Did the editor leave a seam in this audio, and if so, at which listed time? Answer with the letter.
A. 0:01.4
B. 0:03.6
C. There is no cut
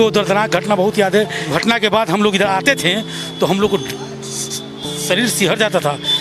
A